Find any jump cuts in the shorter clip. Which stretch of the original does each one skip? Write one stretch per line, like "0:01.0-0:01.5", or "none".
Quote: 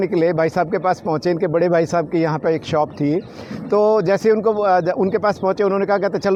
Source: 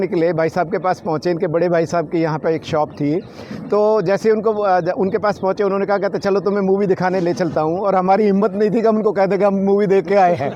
none